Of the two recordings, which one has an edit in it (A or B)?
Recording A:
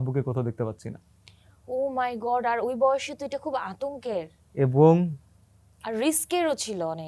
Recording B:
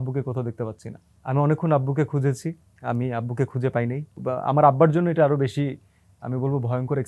B